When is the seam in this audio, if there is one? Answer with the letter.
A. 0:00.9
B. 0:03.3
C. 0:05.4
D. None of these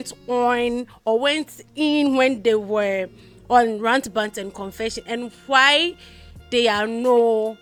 D